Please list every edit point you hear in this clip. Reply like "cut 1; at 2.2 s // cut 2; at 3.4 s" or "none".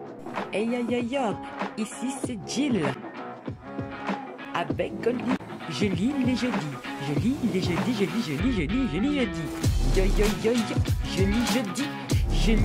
cut 1; at 4.4 s

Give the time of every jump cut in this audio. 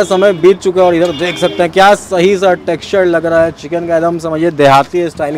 none

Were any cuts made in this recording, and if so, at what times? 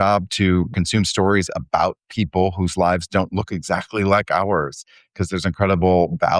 none

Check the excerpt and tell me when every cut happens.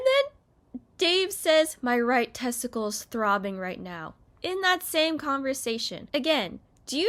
none

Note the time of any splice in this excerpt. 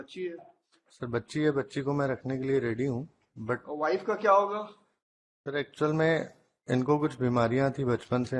none

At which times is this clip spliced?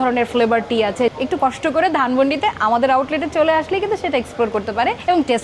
none

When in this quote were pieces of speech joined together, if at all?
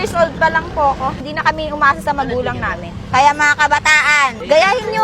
cut 1; at 1.2 s

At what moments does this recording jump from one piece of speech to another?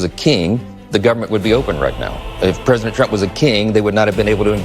none

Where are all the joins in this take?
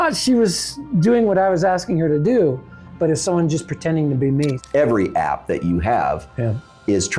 cut 1; at 4.6 s

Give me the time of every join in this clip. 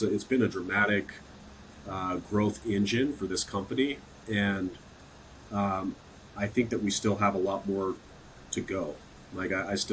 none

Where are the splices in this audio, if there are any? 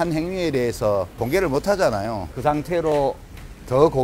cut 1; at 1.1 s // cut 2; at 2.3 s

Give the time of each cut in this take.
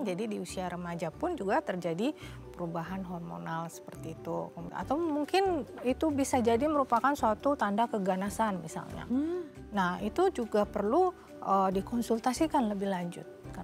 cut 1; at 4.6 s

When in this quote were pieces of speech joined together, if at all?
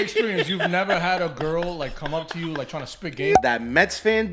cut 1; at 3.4 s

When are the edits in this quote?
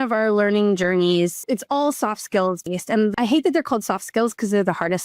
cut 1; at 1.4 s // cut 2; at 3.1 s

